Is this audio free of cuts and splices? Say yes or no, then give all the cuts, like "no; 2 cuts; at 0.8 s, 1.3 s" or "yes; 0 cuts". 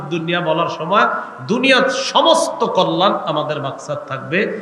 yes; 0 cuts